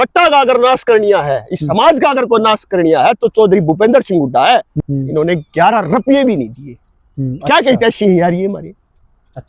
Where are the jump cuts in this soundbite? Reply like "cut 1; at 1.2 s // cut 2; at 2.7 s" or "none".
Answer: cut 1; at 4.7 s